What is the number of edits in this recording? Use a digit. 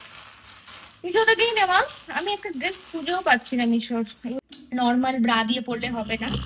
1